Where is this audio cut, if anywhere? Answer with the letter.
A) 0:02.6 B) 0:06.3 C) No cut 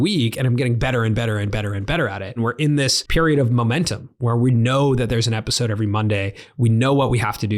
A